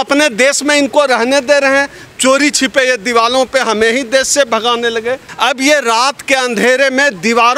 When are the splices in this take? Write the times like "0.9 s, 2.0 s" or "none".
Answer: 5.3 s